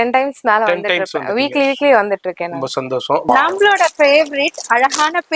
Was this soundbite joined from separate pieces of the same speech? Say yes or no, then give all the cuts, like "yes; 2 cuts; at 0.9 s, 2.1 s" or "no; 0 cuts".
yes; 1 cut; at 3.2 s